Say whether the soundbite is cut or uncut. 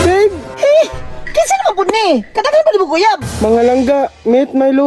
uncut